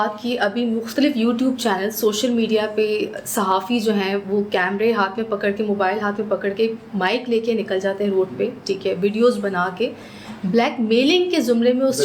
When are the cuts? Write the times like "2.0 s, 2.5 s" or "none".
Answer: none